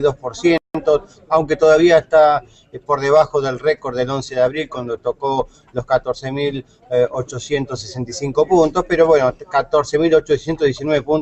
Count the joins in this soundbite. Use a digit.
1